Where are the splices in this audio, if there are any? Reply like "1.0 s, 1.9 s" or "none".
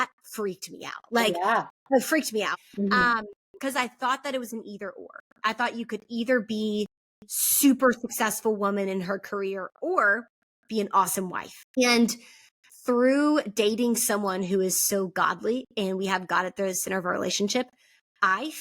2.6 s, 11.8 s